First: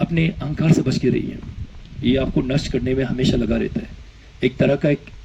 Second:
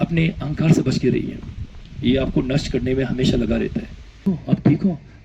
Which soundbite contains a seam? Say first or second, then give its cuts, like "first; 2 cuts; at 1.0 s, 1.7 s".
second; 1 cut; at 4.2 s